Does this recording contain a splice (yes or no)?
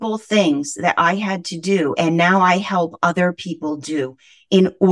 no